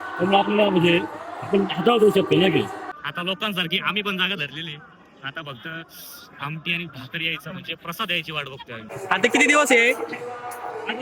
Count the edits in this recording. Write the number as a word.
two